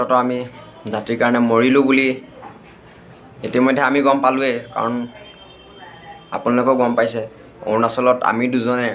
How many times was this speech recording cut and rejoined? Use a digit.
0